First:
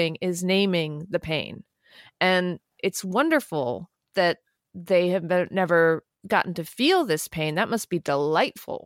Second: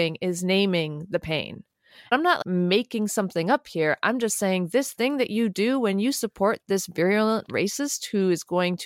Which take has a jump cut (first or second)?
second